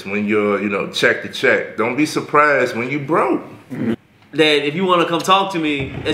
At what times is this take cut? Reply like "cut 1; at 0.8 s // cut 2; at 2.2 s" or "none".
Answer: cut 1; at 4.1 s